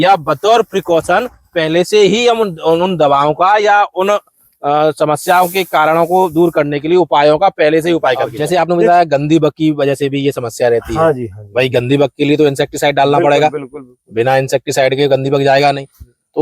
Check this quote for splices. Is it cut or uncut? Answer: cut